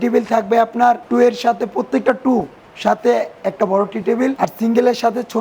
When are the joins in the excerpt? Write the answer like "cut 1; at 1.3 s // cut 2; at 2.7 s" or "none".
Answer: cut 1; at 1.0 s // cut 2; at 4.4 s